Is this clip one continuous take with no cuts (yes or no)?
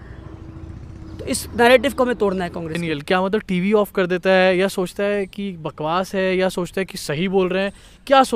no